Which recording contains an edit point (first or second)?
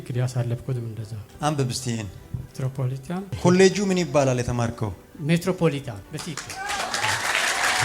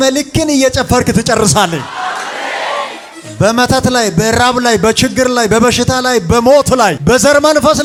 first